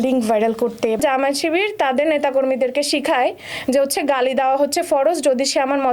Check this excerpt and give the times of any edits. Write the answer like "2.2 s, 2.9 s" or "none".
1.0 s